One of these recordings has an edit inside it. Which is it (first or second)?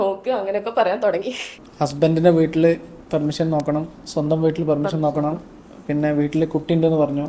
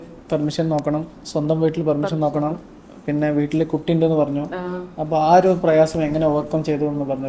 first